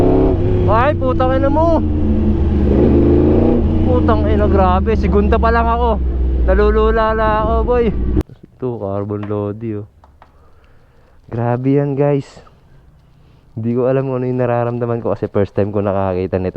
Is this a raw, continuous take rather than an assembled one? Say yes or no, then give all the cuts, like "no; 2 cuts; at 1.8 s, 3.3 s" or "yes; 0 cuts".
no; 1 cut; at 8.2 s